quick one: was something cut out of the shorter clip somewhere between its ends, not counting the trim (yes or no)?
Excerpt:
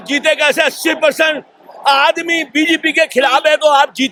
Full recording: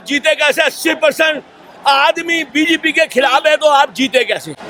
no